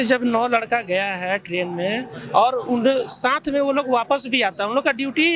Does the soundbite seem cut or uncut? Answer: uncut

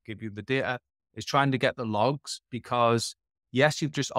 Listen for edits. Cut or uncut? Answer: uncut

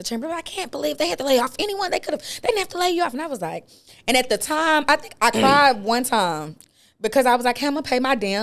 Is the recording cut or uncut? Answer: uncut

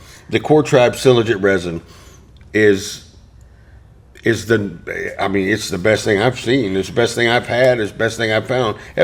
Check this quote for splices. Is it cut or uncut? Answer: uncut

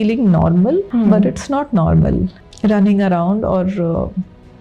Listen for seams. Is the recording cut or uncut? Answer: cut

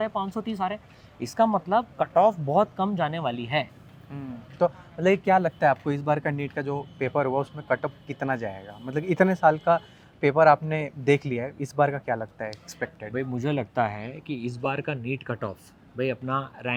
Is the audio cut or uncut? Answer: uncut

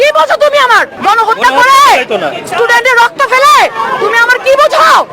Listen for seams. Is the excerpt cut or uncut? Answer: cut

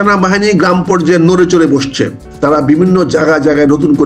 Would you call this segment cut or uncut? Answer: cut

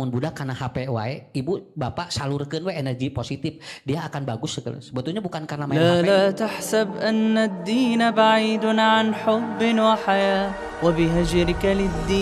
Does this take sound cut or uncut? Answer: cut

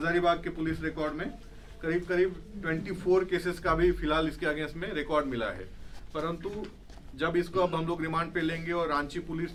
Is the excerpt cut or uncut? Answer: uncut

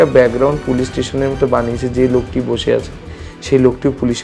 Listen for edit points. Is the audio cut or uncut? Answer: uncut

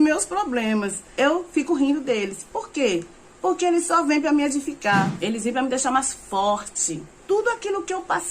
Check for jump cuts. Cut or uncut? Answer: cut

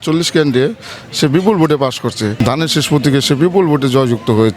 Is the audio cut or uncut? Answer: cut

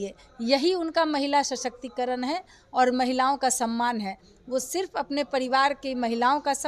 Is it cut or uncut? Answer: uncut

